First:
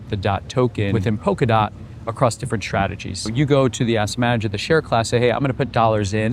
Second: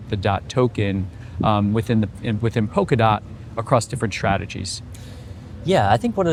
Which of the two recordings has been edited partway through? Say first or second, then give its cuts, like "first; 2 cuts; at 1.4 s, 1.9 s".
first; 2 cuts; at 1.0 s, 3.3 s